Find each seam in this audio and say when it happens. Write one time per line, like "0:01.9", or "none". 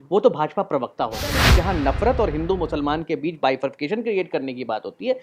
0:01.4